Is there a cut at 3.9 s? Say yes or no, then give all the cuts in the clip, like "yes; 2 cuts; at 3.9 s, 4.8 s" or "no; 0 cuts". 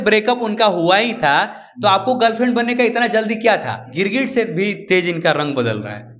yes; 1 cut; at 3.9 s